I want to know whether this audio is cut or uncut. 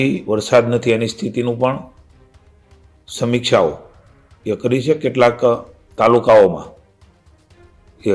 uncut